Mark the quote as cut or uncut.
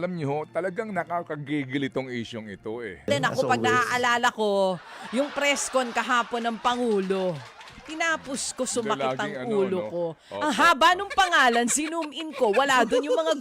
cut